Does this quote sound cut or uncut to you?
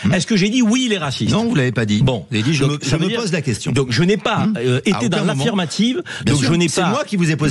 uncut